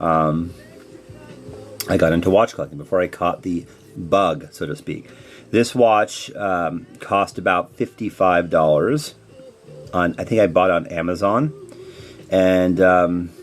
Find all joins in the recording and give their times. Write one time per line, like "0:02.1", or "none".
0:10.8